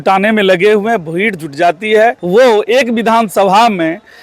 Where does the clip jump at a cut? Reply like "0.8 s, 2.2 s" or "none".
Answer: 2.6 s